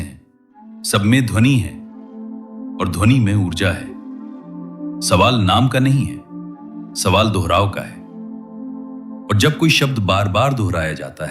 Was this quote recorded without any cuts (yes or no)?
no